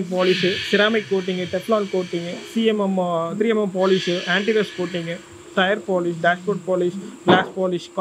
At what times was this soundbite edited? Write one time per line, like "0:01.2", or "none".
none